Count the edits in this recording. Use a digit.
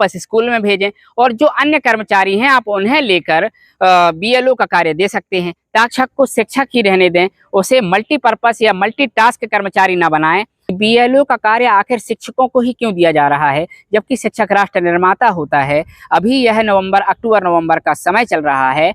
2